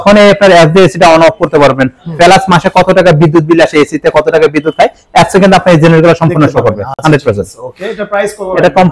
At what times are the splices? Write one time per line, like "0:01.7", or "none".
none